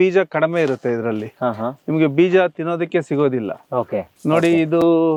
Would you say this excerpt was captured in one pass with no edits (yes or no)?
yes